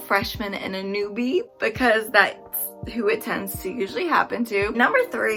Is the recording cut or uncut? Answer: uncut